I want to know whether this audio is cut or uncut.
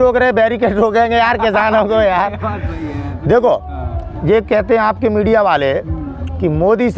uncut